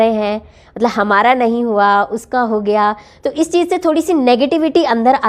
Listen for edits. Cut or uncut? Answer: uncut